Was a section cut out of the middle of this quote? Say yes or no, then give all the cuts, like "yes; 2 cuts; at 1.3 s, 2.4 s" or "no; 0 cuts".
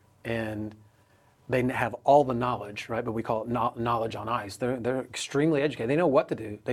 no; 0 cuts